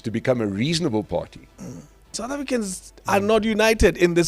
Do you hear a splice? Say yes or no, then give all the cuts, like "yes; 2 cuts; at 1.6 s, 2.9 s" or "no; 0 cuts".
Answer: yes; 1 cut; at 2.2 s